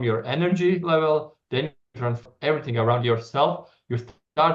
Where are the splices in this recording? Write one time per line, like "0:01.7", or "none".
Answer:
0:01.8